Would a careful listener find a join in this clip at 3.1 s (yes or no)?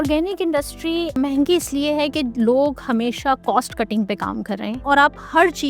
no